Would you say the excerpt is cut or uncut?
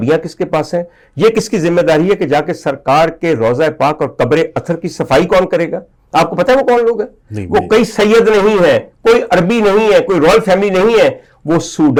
uncut